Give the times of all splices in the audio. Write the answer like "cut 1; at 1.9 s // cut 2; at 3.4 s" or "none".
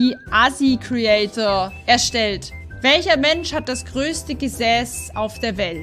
cut 1; at 1.8 s